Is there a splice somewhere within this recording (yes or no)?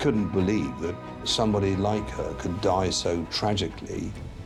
no